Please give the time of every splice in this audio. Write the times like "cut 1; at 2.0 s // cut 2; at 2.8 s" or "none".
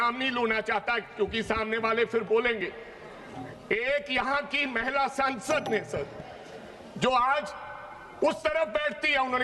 none